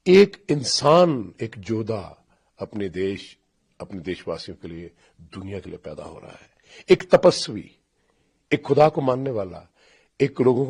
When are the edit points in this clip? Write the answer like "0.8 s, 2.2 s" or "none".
none